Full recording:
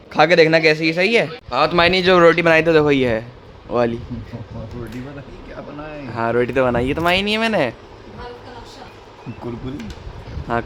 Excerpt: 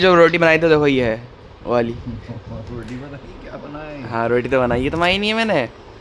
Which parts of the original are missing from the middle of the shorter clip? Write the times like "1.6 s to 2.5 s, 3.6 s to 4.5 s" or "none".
none